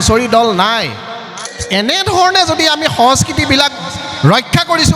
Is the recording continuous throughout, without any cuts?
no; 1 cut; at 1.5 s

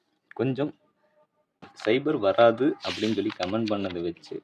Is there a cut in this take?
yes; 1 cut; at 1.6 s

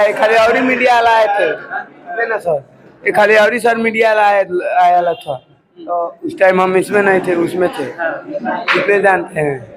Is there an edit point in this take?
no; 0 cuts

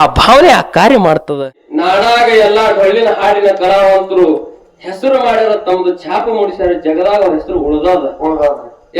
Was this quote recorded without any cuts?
no; 1 cut; at 1.6 s

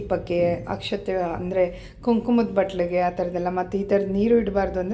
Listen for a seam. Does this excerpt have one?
no; 0 cuts

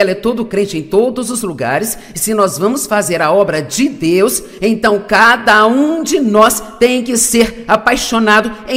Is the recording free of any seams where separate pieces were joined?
yes; 0 cuts

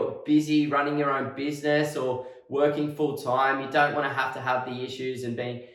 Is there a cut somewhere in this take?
no; 0 cuts

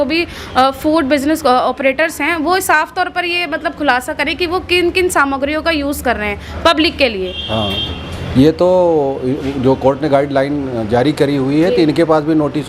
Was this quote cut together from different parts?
no; 0 cuts

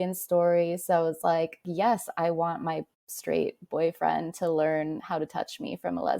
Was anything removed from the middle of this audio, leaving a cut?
yes; 1 cut; at 1.7 s

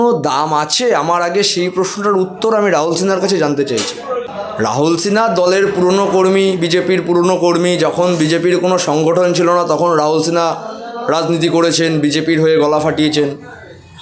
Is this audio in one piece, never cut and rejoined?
no; 1 cut; at 4.3 s

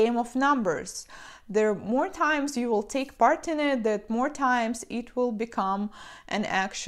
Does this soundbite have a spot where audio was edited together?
yes; 1 cut; at 3.1 s

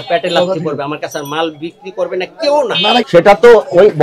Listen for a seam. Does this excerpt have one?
yes; 1 cut; at 3.1 s

